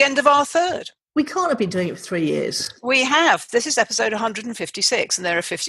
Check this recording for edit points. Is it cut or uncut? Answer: cut